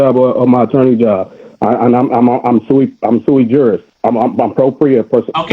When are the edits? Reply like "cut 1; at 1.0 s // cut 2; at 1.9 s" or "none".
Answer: cut 1; at 3.9 s